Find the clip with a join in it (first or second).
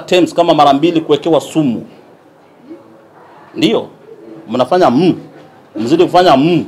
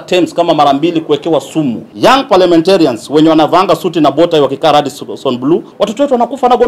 second